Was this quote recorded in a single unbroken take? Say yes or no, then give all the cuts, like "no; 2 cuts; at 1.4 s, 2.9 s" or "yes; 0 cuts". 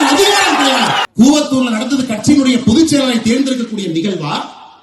no; 1 cut; at 1.0 s